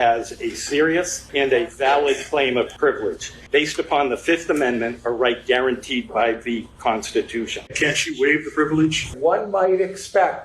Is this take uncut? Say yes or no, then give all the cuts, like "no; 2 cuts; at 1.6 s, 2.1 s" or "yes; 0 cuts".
no; 4 cuts; at 1.2 s, 3.0 s, 7.6 s, 9.1 s